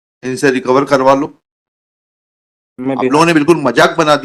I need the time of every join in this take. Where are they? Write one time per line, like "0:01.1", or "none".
none